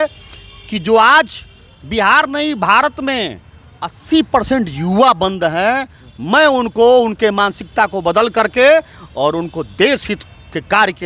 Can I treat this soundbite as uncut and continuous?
yes; 0 cuts

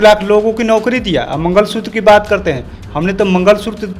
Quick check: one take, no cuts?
yes; 0 cuts

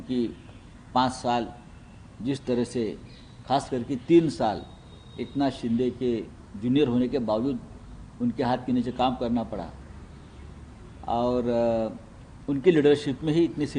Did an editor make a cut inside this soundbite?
no; 0 cuts

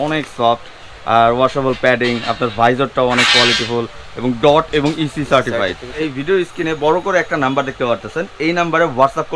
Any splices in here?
yes; 1 cut; at 6.1 s

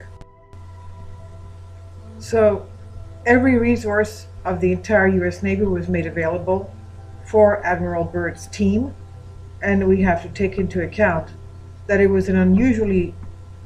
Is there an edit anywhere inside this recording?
yes; 1 cut; at 7.7 s

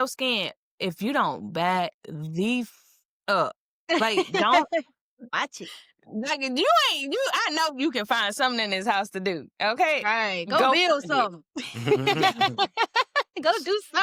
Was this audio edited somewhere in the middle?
no; 0 cuts

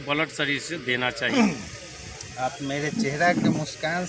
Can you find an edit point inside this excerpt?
yes; 1 cut; at 1.3 s

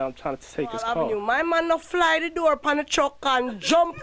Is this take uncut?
no; 1 cut; at 1.1 s

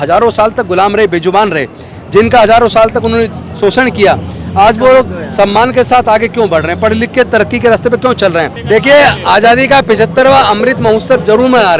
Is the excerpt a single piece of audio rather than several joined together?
no; 1 cut; at 8.6 s

